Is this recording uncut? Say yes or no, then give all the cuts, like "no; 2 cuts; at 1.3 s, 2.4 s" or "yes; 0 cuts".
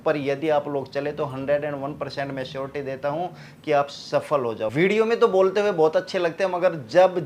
no; 1 cut; at 4.7 s